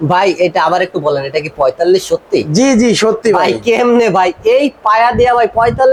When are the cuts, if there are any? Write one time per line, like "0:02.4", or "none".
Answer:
none